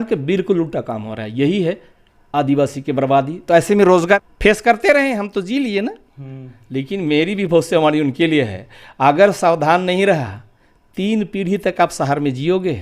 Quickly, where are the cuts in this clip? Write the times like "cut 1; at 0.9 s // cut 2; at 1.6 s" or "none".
cut 1; at 4.2 s